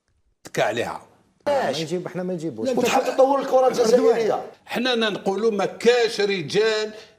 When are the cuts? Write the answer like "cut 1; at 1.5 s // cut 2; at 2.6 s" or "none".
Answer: cut 1; at 1.4 s